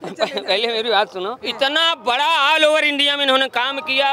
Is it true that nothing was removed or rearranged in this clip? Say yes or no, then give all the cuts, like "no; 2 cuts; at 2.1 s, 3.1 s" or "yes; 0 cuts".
no; 1 cut; at 1.4 s